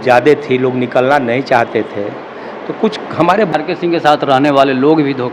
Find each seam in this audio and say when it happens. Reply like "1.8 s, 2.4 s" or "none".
3.5 s